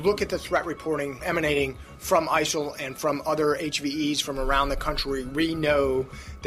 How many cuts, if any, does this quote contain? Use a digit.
1